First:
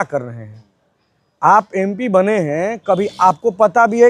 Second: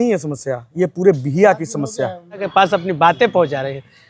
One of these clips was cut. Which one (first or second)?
second